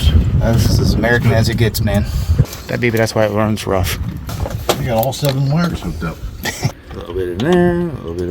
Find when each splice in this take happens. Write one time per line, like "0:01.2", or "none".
0:02.5
0:04.3
0:06.8